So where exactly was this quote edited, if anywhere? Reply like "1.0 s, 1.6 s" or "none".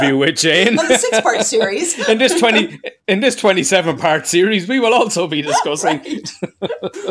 none

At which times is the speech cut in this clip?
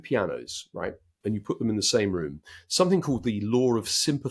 1.1 s

